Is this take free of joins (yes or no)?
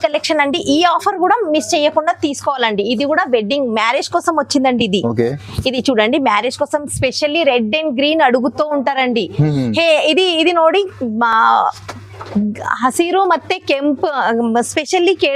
yes